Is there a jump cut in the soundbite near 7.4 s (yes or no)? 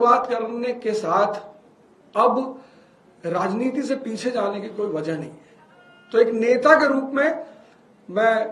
no